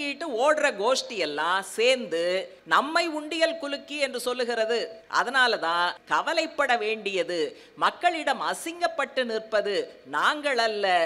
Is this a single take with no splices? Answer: no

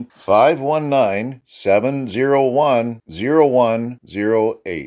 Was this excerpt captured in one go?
yes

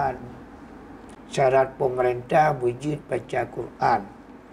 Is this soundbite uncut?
no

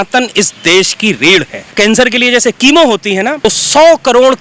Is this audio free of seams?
no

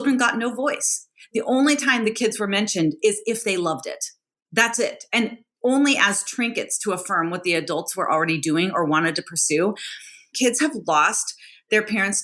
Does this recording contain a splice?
yes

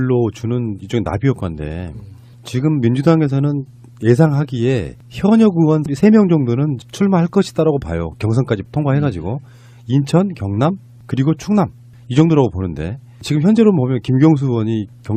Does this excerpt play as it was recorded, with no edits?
yes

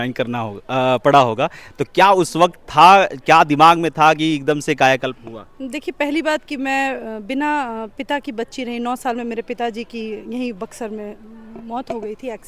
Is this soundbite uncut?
yes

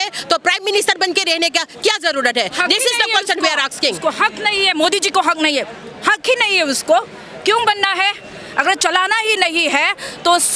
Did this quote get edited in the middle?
no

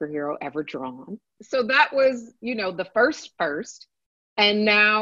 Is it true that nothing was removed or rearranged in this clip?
no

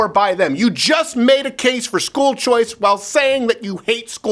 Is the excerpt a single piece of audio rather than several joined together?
yes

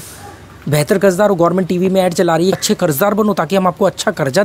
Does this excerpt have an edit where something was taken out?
yes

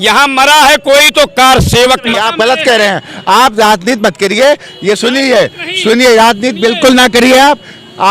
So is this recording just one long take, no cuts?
no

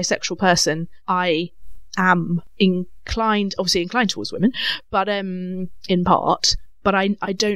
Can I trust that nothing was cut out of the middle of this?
no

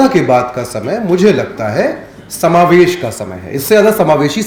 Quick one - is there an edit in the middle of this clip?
no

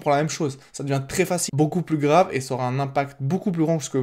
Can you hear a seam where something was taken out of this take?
yes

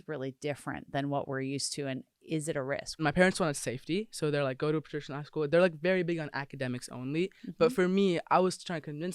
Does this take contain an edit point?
yes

